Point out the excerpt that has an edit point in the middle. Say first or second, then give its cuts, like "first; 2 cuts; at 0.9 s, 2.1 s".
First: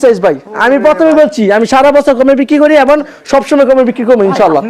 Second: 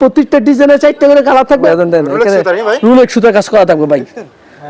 second; 1 cut; at 1.6 s